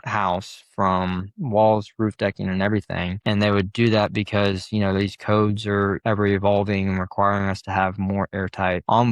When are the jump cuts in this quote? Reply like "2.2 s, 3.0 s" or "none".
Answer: none